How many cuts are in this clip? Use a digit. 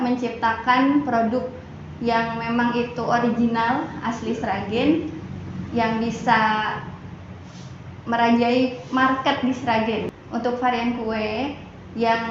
1